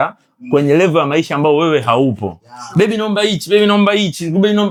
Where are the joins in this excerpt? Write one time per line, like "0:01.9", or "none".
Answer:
none